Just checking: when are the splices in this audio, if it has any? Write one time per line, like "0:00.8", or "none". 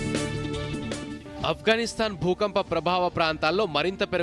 0:00.9